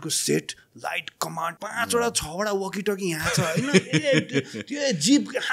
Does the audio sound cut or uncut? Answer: cut